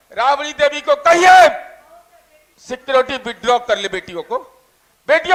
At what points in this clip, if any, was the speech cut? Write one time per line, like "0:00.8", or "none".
none